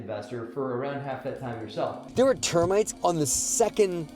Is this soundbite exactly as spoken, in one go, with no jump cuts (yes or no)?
no